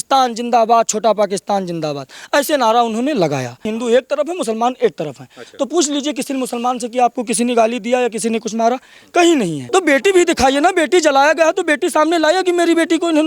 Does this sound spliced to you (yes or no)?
yes